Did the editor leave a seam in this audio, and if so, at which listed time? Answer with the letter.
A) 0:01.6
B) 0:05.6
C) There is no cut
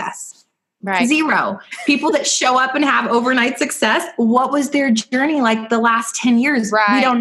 C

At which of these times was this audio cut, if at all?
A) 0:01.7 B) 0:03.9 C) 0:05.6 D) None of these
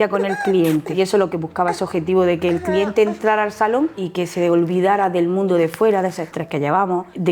D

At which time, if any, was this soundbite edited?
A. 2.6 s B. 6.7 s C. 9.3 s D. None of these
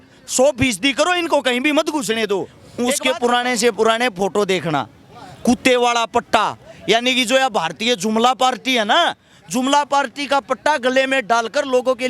A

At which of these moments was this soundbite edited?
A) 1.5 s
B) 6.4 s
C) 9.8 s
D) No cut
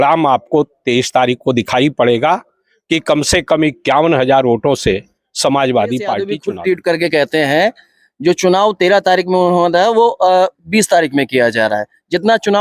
B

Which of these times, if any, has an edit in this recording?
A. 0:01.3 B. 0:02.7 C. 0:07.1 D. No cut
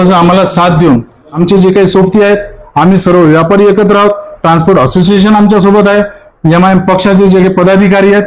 A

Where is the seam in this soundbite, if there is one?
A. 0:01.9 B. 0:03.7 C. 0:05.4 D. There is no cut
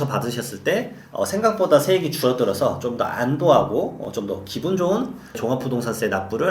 C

